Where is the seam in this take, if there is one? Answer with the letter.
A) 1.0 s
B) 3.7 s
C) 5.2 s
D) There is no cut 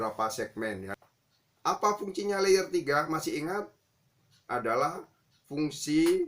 A